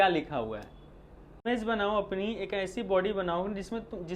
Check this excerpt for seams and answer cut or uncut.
cut